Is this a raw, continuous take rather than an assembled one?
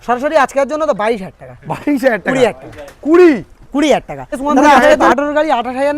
no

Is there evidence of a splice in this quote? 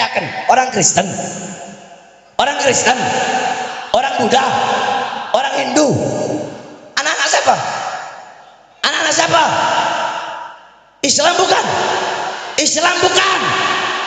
no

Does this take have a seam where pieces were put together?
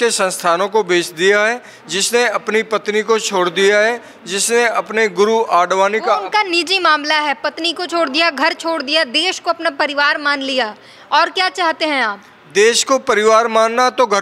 no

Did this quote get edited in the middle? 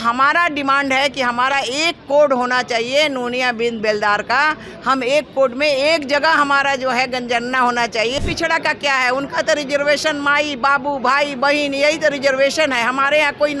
yes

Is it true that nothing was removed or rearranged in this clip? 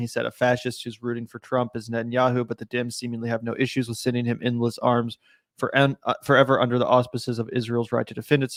yes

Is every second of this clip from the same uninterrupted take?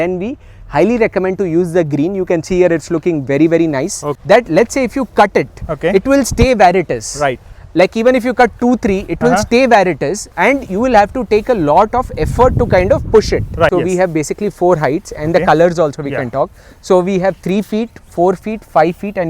no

